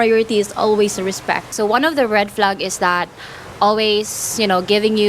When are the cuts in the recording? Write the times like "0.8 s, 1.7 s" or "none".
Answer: 1.5 s